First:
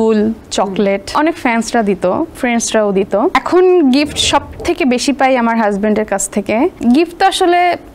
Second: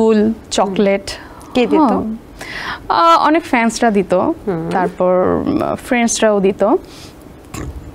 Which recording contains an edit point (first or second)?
first